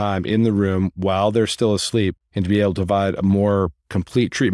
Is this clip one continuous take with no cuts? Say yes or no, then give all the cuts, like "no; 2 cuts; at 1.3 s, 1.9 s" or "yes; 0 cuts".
no; 1 cut; at 2.3 s